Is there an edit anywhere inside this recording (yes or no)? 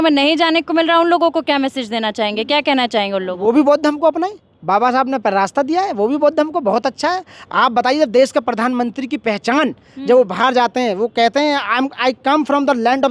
no